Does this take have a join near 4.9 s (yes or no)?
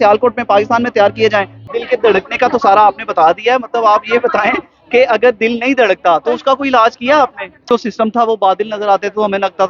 no